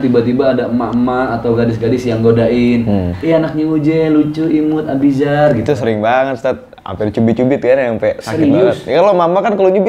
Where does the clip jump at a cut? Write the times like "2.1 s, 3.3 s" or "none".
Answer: none